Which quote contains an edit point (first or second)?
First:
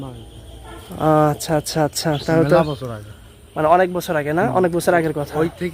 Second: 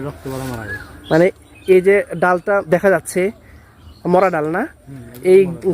second